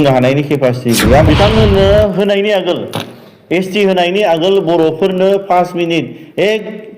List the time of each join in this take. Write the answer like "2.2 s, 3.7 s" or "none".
1.2 s